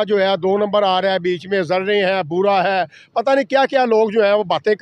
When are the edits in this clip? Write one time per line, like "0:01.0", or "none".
none